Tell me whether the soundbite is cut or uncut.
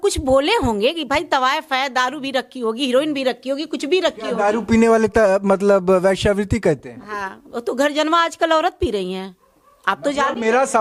uncut